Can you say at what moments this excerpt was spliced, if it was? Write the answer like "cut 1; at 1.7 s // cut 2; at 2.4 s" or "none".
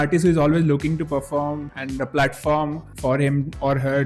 cut 1; at 1.7 s // cut 2; at 2.9 s